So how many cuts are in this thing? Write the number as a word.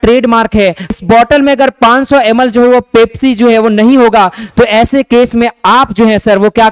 one